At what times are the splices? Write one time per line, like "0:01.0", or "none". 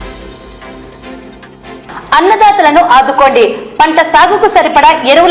0:01.7